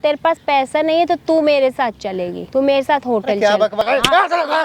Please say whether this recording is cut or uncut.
cut